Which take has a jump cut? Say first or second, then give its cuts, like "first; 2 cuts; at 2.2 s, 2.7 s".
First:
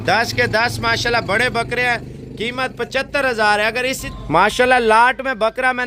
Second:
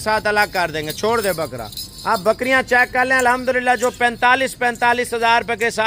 first; 1 cut; at 4.0 s